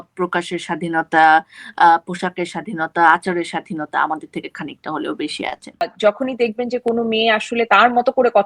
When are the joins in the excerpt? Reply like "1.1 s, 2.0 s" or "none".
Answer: 5.9 s